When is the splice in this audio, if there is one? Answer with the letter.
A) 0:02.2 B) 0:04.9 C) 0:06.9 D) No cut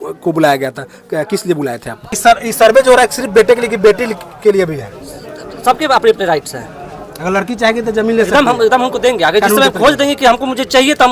A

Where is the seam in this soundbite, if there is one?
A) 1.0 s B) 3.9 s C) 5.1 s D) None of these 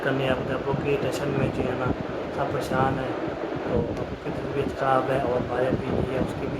B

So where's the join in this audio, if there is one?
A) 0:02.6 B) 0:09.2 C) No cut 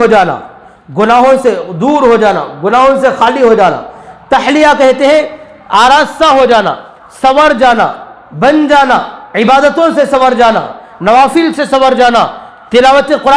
B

